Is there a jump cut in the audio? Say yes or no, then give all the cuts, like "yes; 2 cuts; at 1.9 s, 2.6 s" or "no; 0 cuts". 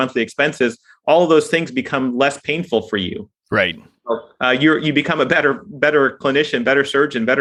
no; 0 cuts